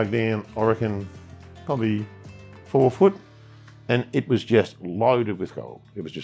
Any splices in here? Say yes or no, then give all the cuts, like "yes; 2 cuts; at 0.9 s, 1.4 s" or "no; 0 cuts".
no; 0 cuts